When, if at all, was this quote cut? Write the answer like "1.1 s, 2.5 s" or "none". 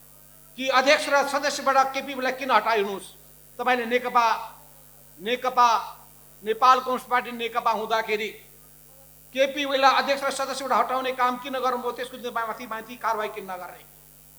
none